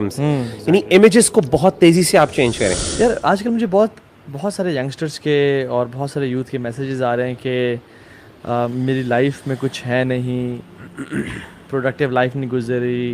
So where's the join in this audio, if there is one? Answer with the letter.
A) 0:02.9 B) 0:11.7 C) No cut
A